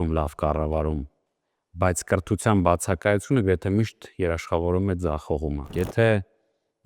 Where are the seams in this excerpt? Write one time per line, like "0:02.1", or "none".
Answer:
0:05.7